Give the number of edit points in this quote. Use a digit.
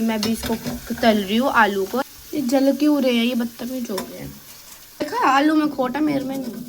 2